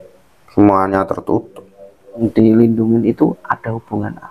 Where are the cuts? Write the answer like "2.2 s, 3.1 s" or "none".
2.2 s